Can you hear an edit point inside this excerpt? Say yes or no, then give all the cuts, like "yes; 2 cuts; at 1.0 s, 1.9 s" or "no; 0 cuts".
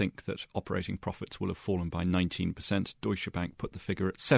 no; 0 cuts